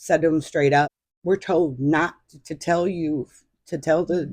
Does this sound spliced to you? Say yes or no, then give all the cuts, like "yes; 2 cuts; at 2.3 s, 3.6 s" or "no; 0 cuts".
yes; 1 cut; at 1.1 s